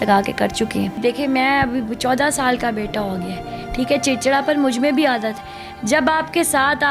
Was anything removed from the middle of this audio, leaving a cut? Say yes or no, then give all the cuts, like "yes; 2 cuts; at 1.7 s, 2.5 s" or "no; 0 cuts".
yes; 1 cut; at 1.0 s